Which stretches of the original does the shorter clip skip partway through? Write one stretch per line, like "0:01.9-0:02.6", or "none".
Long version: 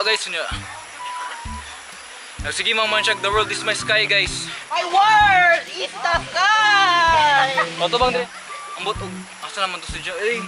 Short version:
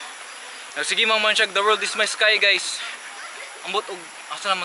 0:04.7-0:08.2